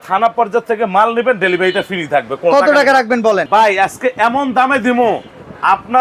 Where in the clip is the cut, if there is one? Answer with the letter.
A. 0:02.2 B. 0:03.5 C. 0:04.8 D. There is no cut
B